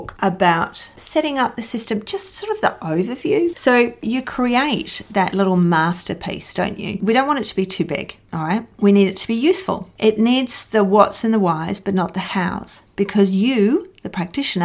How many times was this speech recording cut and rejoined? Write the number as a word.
three